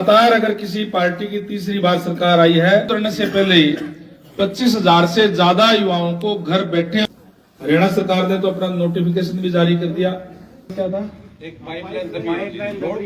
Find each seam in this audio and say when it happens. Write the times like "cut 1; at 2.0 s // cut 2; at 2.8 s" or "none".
cut 1; at 2.9 s // cut 2; at 7.0 s // cut 3; at 10.7 s